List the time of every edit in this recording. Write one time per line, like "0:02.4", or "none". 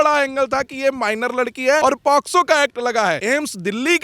0:01.8
0:03.2